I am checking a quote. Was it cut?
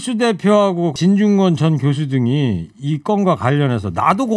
yes; 1 cut; at 0.9 s

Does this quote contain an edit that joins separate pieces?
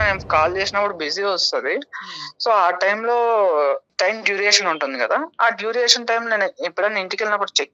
no; 0 cuts

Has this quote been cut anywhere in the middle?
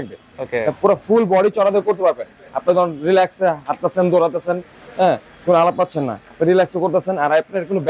no; 0 cuts

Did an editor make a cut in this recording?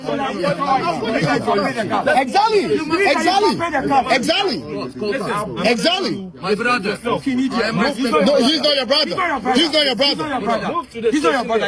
no; 0 cuts

